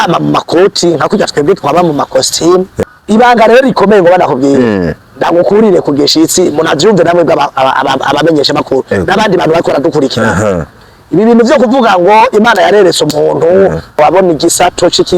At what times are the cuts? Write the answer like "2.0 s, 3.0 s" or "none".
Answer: 2.8 s, 14.0 s